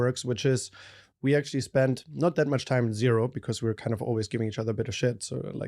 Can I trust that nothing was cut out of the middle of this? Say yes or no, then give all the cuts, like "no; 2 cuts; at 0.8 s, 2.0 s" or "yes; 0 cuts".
yes; 0 cuts